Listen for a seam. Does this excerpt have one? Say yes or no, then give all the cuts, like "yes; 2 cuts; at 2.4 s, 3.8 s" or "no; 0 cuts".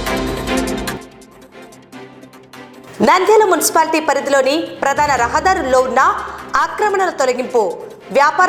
no; 0 cuts